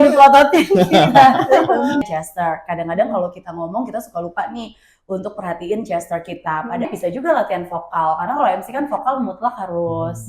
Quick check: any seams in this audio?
yes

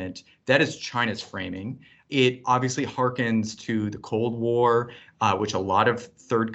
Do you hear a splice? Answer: no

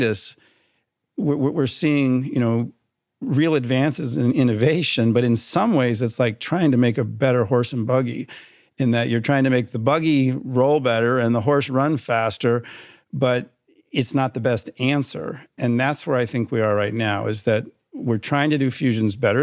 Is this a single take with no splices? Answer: no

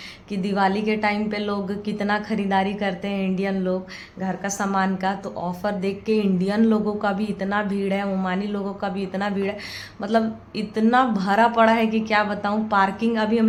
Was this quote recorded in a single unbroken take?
yes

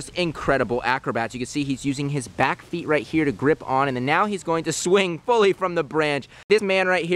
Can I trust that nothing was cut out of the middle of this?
yes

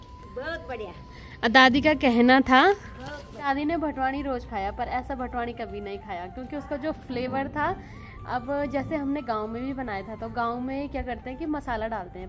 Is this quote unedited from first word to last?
yes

